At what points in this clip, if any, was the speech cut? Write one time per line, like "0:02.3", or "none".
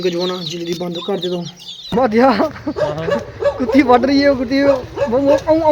0:01.9

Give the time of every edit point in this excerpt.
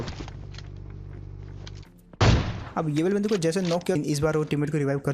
0:04.0

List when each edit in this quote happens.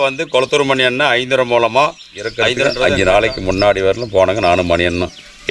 0:02.6

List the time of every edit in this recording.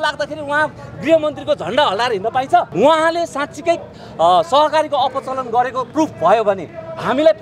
0:02.7

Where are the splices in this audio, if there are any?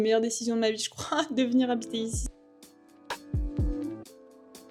none

